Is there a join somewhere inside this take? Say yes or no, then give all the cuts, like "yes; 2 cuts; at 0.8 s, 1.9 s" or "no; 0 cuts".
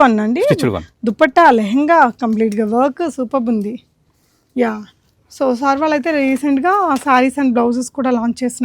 no; 0 cuts